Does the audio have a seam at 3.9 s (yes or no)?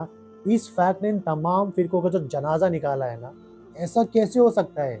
yes